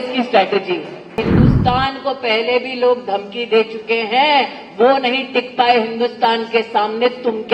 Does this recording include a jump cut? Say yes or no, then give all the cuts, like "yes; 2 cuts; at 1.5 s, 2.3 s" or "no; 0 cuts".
yes; 1 cut; at 1.2 s